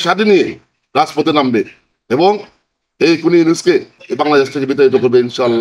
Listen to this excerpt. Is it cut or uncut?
uncut